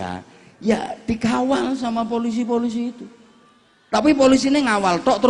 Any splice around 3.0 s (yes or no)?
no